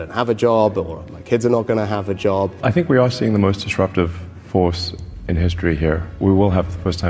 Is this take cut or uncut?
cut